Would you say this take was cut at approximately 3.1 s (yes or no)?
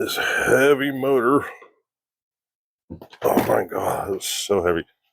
no